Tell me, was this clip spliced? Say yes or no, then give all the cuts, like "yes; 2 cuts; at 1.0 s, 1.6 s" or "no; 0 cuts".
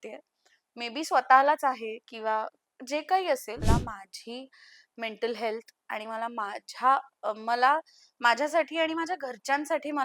yes; 1 cut; at 3.6 s